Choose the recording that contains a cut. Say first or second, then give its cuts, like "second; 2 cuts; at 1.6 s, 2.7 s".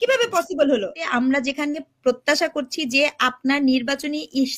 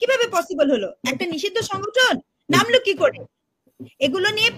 first; 1 cut; at 1.0 s